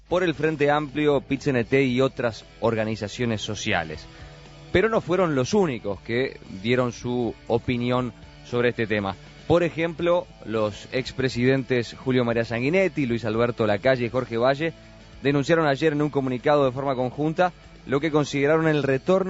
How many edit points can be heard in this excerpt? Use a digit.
1